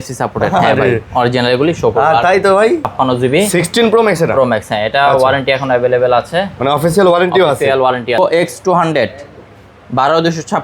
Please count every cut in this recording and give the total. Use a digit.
2